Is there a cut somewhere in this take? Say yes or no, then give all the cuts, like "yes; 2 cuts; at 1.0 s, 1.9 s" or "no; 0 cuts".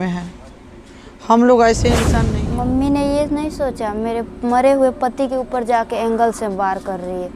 yes; 1 cut; at 2.1 s